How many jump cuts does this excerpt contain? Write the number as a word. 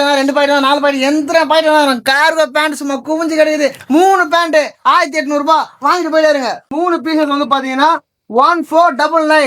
one